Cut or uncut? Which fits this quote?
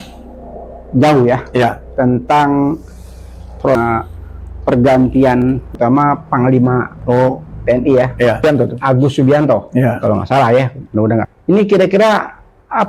cut